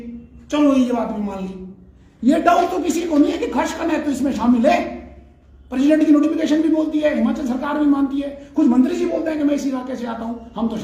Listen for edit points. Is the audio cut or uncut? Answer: uncut